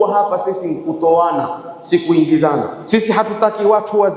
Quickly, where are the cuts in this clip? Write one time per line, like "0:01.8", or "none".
0:02.8